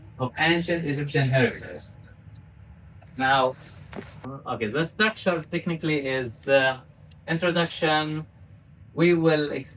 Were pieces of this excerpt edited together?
yes; 1 cut; at 4.3 s

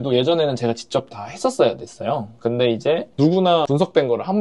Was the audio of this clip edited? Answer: yes; 1 cut; at 3.4 s

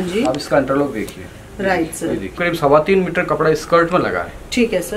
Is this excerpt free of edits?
no; 1 cut; at 2.4 s

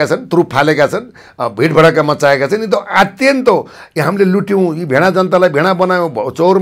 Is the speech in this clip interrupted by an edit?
no; 0 cuts

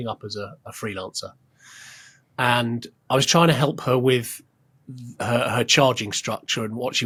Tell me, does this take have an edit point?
no; 0 cuts

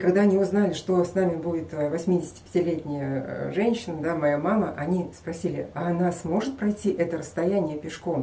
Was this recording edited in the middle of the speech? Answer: no; 0 cuts

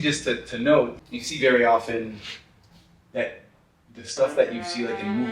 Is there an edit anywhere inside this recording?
yes; 1 cut; at 0.9 s

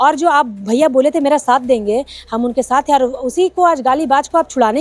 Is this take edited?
no; 0 cuts

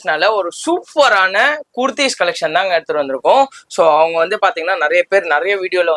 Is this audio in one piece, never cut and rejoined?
yes; 0 cuts

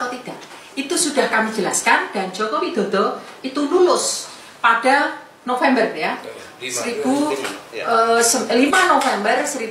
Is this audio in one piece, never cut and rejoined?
yes; 0 cuts

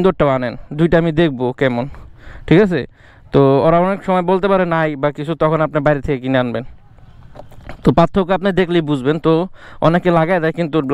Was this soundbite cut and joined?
no; 0 cuts

